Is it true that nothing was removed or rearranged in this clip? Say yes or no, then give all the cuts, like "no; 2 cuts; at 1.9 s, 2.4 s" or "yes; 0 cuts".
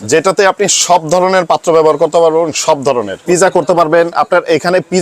no; 1 cut; at 3.2 s